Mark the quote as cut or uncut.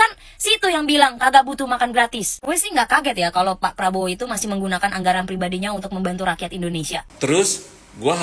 cut